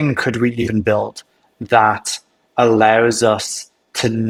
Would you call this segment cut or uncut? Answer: uncut